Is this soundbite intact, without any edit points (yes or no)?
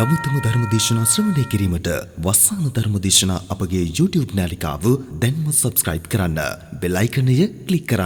yes